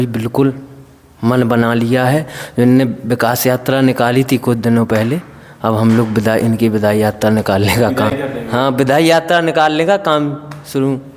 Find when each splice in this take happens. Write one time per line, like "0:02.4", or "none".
none